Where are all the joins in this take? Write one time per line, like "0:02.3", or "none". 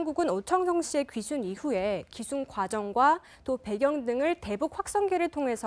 none